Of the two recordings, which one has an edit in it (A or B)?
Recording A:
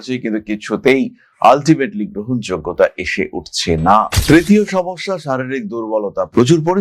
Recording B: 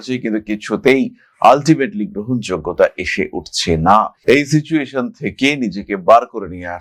A